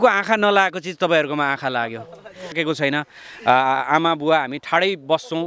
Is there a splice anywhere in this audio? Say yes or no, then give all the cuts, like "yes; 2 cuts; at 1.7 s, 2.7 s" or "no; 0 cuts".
yes; 1 cut; at 2.6 s